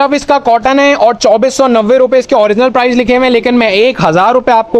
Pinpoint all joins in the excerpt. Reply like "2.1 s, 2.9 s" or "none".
none

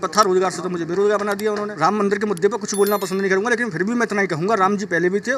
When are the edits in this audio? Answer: 1.7 s

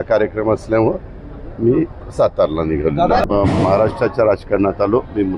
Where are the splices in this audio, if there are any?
3.2 s

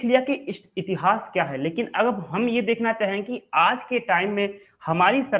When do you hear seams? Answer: none

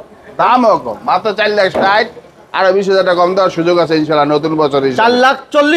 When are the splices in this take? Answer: none

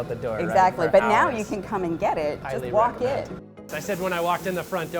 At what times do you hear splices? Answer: 2.4 s, 3.4 s

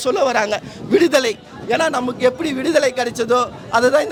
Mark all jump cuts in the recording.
none

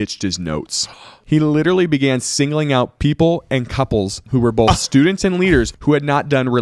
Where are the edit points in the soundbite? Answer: 1.2 s, 4.2 s, 5.7 s

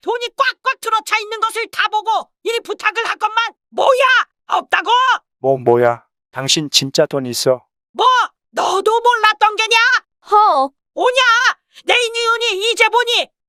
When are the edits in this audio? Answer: none

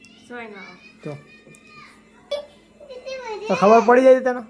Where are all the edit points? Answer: 2.3 s

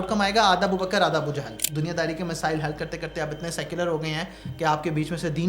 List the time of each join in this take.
1.6 s

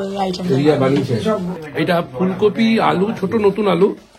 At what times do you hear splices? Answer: 1.6 s

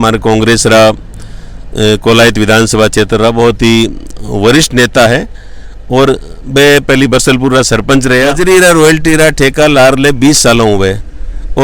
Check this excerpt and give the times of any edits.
8.4 s

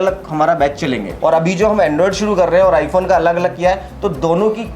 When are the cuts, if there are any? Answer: 1.2 s

